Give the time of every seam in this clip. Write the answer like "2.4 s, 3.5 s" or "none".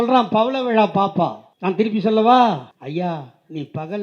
1.5 s, 2.7 s